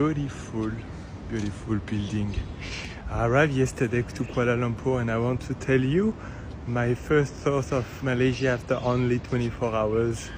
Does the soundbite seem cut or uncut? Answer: uncut